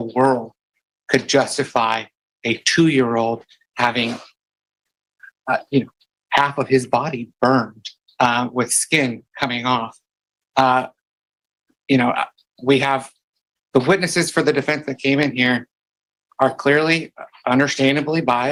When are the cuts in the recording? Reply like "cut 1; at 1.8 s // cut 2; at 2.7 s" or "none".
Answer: none